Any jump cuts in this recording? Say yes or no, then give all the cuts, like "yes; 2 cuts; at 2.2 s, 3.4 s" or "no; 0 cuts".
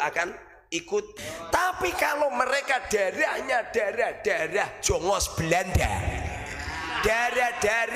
yes; 1 cut; at 1.1 s